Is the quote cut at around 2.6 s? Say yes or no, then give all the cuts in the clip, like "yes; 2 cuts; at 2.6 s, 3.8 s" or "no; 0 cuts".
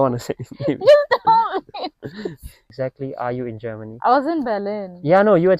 yes; 1 cut; at 2.6 s